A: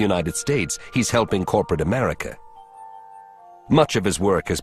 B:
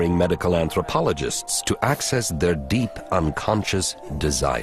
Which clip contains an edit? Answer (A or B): A